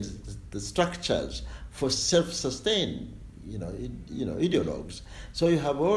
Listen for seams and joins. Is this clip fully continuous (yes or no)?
yes